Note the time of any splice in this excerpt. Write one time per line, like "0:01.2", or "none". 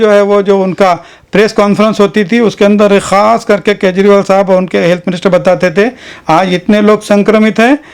none